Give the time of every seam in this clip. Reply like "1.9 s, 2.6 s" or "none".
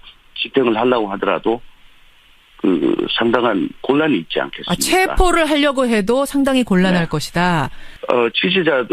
7.8 s